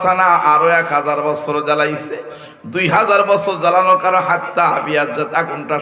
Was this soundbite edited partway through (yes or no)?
no